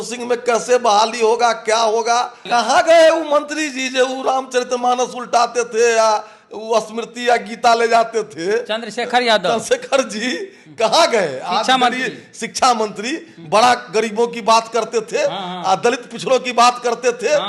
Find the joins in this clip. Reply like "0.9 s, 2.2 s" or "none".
2.4 s

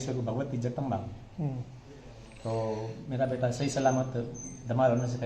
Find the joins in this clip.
none

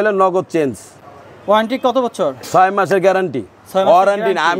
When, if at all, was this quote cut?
none

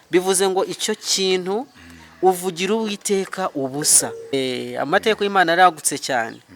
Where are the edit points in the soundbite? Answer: 4.3 s

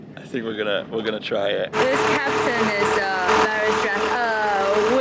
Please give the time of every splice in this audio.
1.8 s, 3.3 s

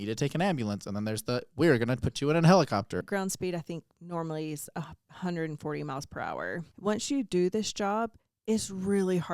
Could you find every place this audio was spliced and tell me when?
3.0 s, 6.7 s

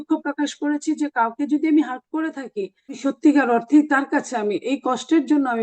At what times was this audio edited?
3.0 s

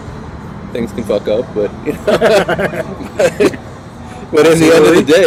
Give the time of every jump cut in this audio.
none

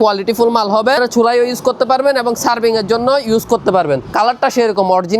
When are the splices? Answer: 1.0 s, 4.1 s

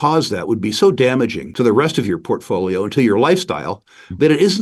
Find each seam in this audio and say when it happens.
1.4 s

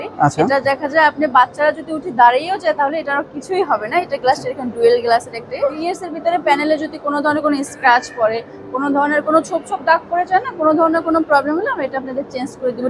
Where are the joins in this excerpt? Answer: 5.7 s

